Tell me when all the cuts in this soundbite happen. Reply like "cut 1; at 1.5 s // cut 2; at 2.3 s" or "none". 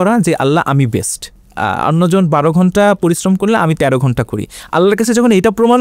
cut 1; at 1.4 s